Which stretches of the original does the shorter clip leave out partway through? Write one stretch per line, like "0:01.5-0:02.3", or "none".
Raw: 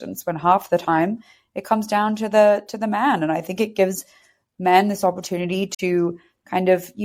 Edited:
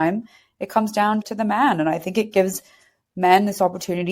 0:02.2-0:02.7